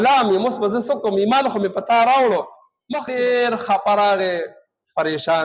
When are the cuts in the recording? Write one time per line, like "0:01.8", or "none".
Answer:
0:03.0